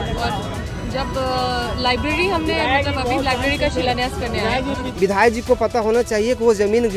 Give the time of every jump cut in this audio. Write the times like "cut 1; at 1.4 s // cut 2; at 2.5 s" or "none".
cut 1; at 4.8 s